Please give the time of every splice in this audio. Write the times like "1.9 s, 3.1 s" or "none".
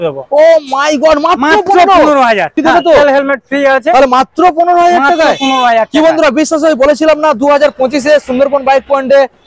2.6 s